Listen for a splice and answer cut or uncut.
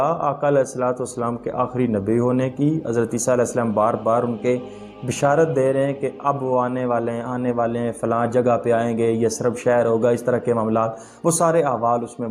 uncut